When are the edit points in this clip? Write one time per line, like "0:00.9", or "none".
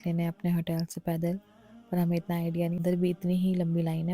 0:02.8